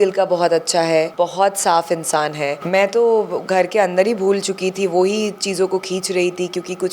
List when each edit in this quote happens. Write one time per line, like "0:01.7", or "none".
0:01.1
0:02.6